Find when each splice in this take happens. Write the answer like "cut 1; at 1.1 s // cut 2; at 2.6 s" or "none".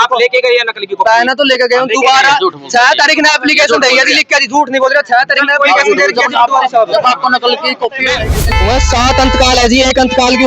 cut 1; at 8.5 s